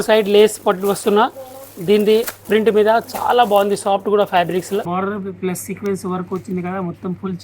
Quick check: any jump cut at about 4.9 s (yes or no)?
yes